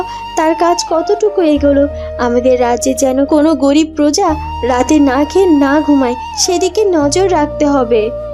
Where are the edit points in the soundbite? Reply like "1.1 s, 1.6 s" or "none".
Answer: none